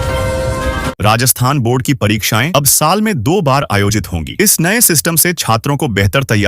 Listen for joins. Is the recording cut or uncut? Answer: cut